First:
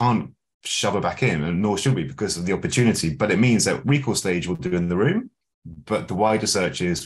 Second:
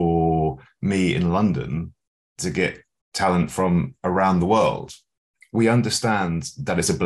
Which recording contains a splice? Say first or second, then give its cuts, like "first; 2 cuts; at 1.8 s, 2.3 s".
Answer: second; 1 cut; at 5.3 s